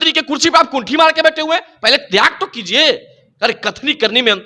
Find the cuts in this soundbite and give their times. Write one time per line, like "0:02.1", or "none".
none